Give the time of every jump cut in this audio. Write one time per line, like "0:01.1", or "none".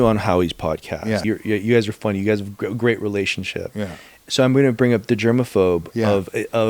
0:01.2
0:04.2